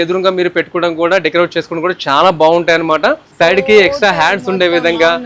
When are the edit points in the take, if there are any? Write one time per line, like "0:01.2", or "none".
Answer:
0:03.2